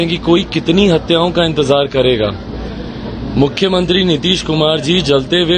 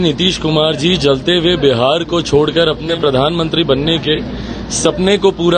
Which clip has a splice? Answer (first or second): second